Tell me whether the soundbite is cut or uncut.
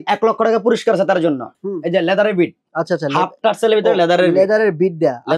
cut